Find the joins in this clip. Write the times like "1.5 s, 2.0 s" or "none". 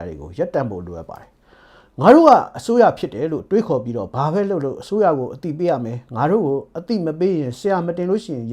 none